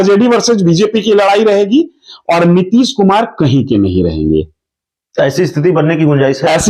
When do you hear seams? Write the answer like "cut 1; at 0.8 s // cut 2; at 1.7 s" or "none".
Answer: none

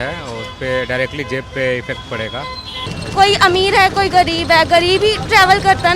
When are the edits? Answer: cut 1; at 3.0 s

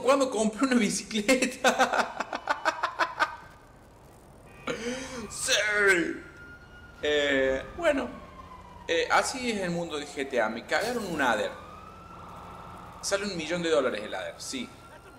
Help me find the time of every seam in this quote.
none

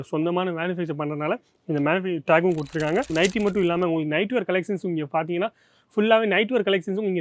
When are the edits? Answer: cut 1; at 3.1 s

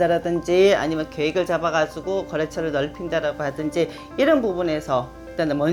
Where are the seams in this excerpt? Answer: none

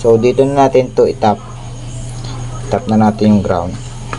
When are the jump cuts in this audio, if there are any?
none

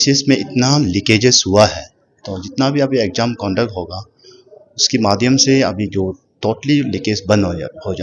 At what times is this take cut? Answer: none

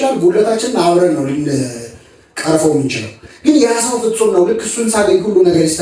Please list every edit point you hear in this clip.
none

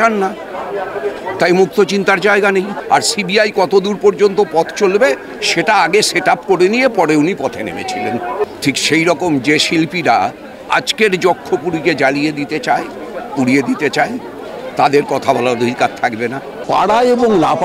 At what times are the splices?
cut 1; at 2.8 s // cut 2; at 8.4 s // cut 3; at 16.6 s

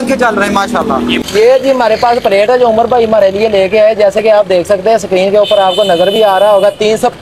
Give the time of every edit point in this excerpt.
cut 1; at 1.2 s

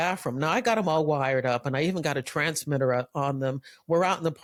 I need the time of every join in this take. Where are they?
none

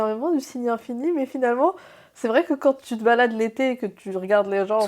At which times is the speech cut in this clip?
cut 1; at 2.9 s

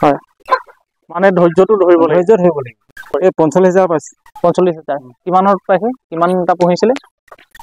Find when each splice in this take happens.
cut 1; at 3.1 s

